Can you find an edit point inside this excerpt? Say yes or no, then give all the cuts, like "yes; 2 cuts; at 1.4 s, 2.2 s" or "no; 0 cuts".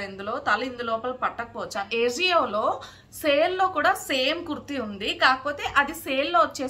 yes; 1 cut; at 1.9 s